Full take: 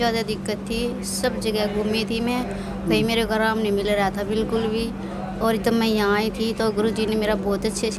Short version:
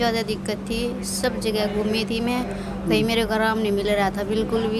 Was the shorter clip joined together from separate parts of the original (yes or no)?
no